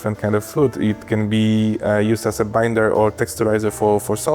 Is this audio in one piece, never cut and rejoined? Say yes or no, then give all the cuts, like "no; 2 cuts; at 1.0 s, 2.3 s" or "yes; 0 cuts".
yes; 0 cuts